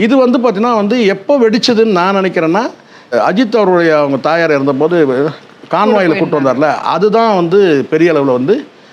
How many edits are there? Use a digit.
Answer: 1